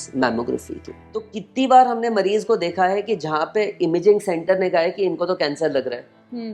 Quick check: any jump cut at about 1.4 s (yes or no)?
yes